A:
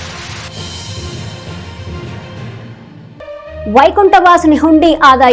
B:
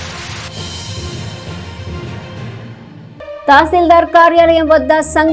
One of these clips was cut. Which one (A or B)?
A